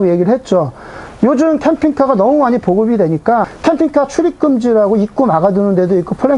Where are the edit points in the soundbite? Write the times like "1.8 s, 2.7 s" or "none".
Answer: 3.5 s